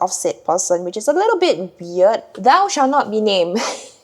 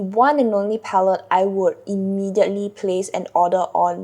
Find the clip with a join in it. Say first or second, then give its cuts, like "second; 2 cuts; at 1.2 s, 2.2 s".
first; 1 cut; at 2.2 s